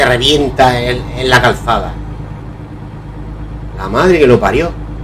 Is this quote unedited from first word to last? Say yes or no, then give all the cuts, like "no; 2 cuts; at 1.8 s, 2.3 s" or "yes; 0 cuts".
no; 1 cut; at 2.3 s